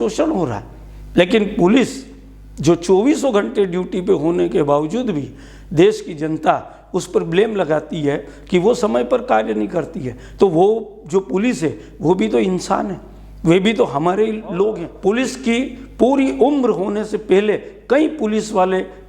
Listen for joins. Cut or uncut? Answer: cut